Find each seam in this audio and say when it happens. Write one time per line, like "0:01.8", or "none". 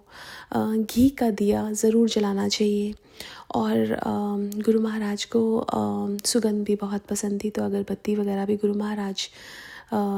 none